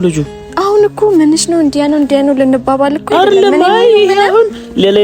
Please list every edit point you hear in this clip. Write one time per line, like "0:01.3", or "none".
none